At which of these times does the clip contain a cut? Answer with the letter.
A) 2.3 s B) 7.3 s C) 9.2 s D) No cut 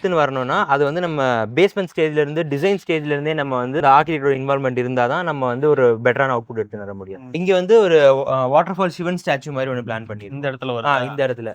B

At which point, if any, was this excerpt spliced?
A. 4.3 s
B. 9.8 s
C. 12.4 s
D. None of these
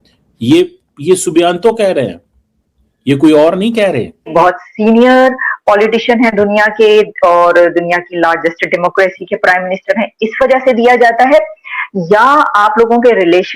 A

